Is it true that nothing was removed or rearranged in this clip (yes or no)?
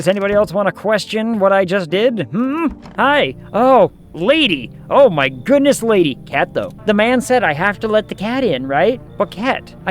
no